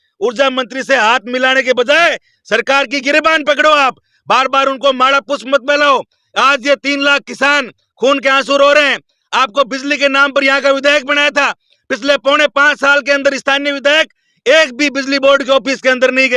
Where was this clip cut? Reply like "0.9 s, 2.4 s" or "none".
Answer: none